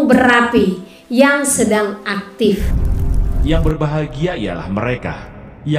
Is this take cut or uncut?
cut